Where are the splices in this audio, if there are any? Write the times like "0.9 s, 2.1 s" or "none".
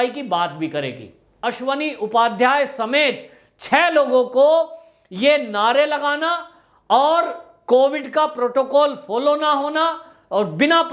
1.4 s